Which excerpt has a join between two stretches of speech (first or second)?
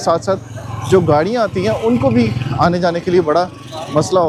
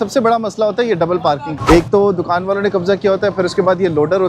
second